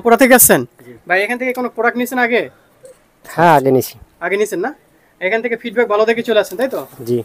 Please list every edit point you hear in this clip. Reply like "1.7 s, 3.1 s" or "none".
none